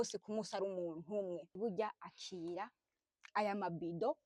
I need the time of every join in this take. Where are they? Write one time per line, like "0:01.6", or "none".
0:01.5